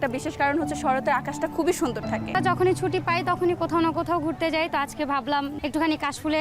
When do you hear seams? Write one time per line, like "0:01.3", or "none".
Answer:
0:02.4
0:05.5